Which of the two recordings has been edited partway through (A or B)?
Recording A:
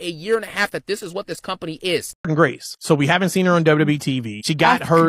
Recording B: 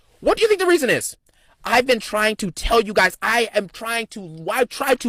A